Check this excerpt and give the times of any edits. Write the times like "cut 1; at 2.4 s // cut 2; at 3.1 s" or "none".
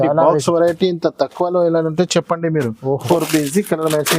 cut 1; at 3.1 s